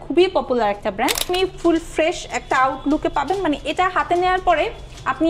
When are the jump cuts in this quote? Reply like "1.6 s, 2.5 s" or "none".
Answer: 1.3 s